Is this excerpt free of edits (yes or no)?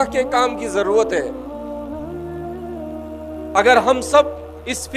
no